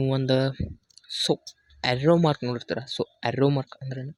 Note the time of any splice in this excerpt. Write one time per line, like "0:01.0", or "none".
none